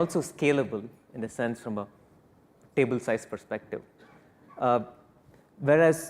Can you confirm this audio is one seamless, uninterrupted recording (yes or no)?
no